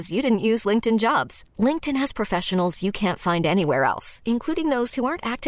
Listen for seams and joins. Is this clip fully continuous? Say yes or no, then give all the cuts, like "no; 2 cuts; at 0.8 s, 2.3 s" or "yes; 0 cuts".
yes; 0 cuts